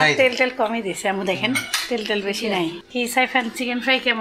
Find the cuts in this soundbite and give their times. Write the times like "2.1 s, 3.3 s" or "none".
none